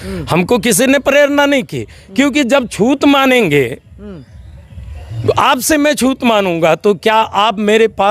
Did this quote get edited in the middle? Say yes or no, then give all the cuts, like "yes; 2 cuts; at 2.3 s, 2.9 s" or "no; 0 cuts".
no; 0 cuts